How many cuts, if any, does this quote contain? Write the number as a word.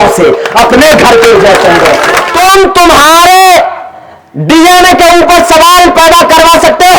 one